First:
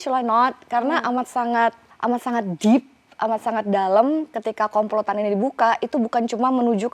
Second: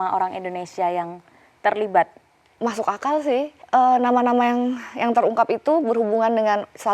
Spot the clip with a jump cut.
second; 2 cuts; at 2.5 s, 3.6 s

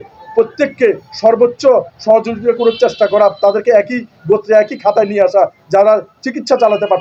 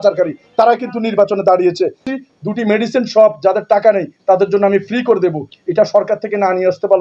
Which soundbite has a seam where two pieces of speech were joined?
second; 1 cut; at 2.0 s

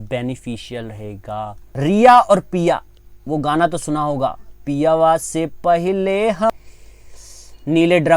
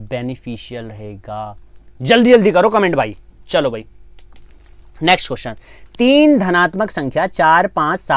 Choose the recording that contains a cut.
first; 2 cuts; at 1.6 s, 6.5 s

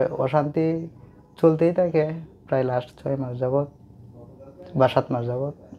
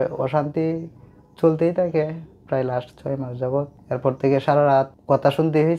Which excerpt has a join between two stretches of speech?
second; 2 cuts; at 3.8 s, 5.0 s

